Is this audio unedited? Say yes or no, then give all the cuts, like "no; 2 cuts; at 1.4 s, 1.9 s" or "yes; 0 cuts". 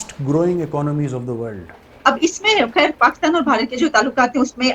no; 1 cut; at 1.8 s